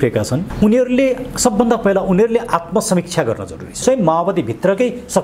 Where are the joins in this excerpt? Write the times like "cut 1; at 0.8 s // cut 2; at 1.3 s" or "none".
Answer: cut 1; at 3.8 s